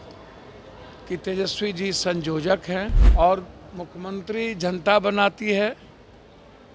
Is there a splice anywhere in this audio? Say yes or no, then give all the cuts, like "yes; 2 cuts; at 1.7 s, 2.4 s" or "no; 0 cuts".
yes; 1 cut; at 3.0 s